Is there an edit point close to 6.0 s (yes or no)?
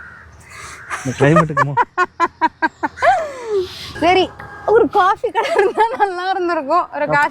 no